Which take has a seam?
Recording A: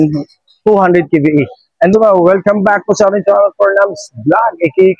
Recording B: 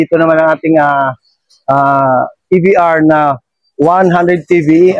A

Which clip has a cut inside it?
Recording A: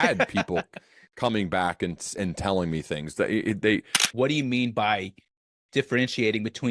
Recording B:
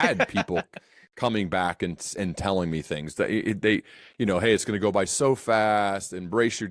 A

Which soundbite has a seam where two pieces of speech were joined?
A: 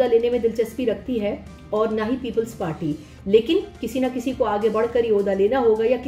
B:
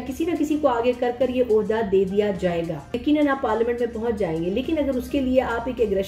B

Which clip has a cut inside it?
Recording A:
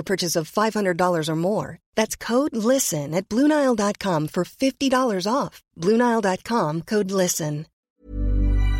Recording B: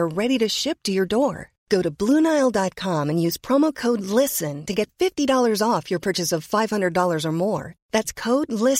A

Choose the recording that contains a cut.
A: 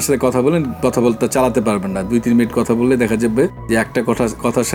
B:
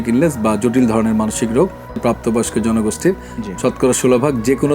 B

